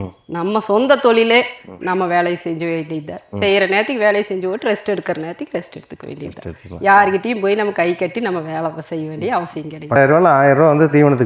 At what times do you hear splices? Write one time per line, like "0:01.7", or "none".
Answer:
0:10.0